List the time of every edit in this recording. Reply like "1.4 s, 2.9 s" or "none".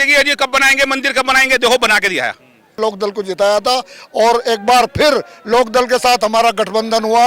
2.8 s